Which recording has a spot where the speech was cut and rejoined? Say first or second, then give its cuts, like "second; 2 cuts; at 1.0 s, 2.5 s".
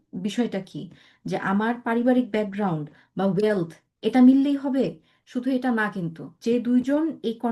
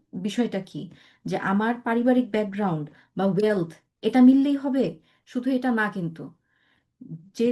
first; 1 cut; at 6.3 s